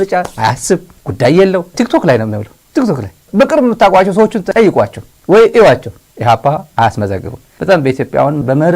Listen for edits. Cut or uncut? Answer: uncut